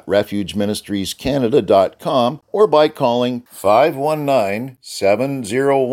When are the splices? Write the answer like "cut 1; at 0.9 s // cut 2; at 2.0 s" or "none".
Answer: cut 1; at 2.4 s